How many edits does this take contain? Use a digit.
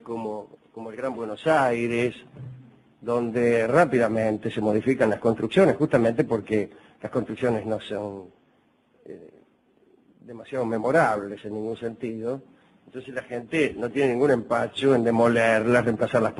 0